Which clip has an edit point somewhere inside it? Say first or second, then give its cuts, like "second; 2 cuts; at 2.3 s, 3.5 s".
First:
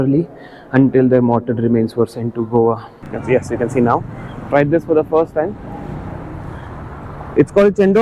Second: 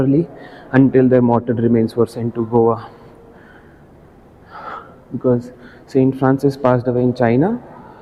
first; 1 cut; at 3.1 s